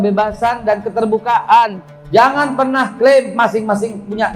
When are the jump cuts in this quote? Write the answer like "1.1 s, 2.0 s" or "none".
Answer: none